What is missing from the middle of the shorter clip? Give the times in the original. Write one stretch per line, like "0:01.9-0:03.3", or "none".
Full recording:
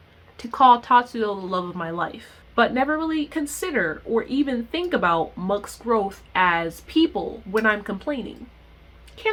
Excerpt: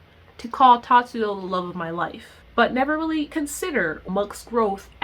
0:04.0-0:05.3